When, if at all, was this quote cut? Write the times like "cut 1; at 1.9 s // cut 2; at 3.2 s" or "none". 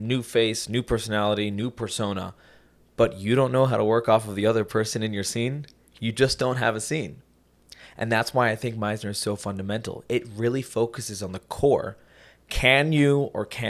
none